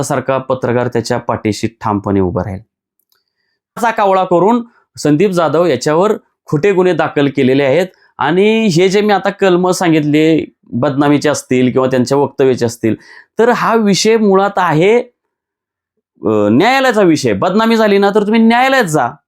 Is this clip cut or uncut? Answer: cut